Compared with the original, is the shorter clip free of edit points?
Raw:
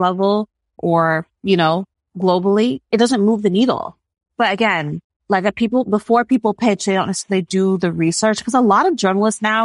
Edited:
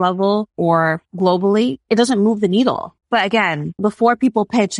no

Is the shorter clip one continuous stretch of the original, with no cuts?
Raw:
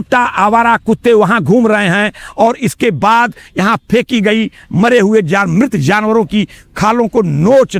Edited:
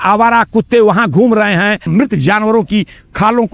no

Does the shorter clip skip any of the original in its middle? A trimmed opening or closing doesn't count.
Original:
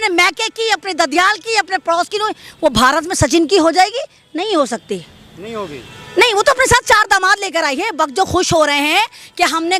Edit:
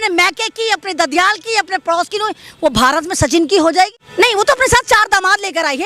yes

